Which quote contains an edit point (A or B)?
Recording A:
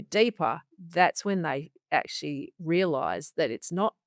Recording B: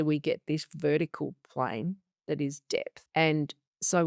B